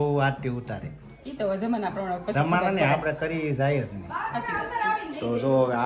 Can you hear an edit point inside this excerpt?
no; 0 cuts

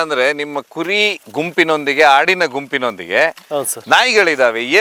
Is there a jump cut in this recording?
no; 0 cuts

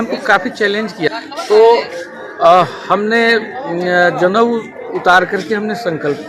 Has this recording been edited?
yes; 1 cut; at 1.1 s

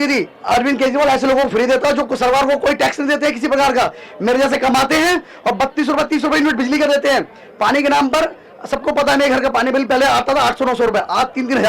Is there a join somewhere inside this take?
no; 0 cuts

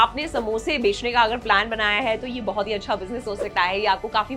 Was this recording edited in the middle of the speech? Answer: no; 0 cuts

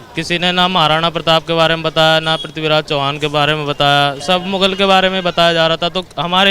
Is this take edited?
yes; 1 cut; at 4.2 s

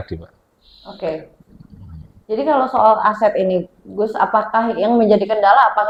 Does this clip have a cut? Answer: no; 0 cuts

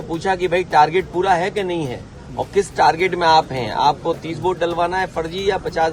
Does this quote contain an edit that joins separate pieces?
no; 0 cuts

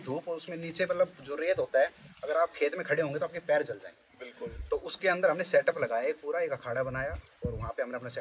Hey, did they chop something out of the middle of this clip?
no; 0 cuts

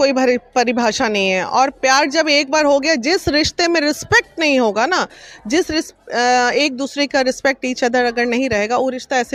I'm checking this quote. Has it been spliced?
no; 0 cuts

